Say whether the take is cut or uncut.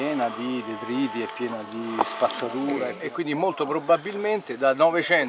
cut